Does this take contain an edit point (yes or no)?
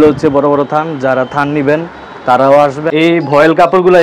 yes